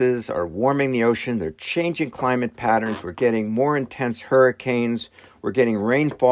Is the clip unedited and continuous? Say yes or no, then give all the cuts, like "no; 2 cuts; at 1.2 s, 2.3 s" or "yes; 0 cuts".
yes; 0 cuts